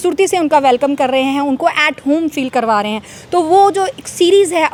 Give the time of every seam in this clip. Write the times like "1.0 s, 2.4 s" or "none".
none